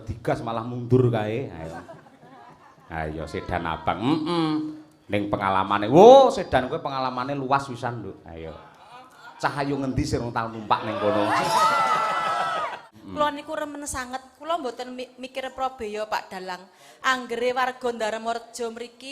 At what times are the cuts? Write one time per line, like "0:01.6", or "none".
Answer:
0:12.8

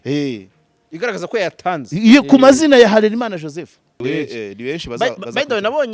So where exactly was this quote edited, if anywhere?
0:04.0

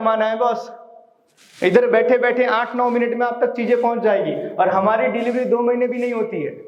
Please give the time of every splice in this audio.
none

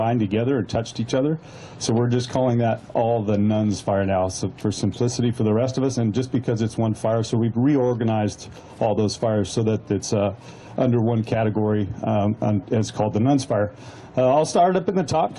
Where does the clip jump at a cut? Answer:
0:06.4

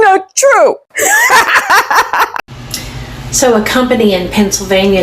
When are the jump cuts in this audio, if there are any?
0:02.3

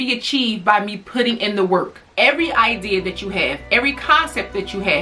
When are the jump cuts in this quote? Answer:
0:02.1

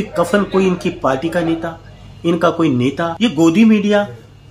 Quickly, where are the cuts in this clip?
0:03.1

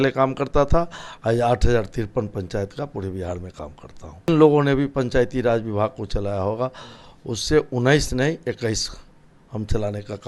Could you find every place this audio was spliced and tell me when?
0:04.3

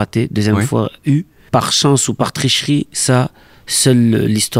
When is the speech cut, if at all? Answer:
0:01.4

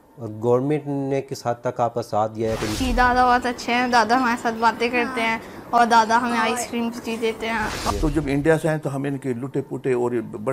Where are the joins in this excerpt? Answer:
0:02.8
0:07.9

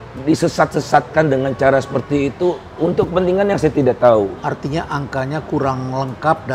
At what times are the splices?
none

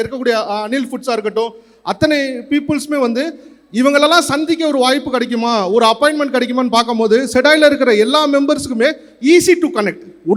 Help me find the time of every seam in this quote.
none

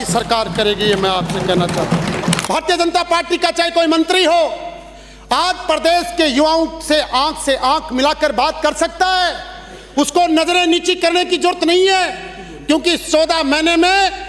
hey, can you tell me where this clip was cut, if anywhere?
0:02.4

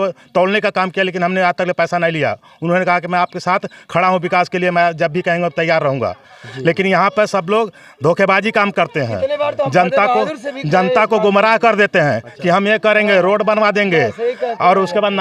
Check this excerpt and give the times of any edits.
none

